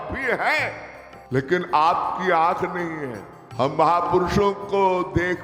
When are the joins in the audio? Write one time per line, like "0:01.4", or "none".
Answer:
none